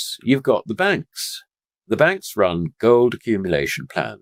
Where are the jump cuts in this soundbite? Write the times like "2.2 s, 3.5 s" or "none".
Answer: none